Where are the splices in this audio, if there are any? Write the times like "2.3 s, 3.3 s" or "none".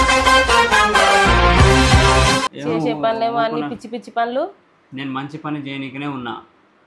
none